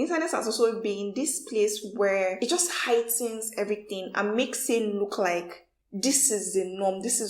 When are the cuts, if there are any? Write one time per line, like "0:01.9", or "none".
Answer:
0:02.4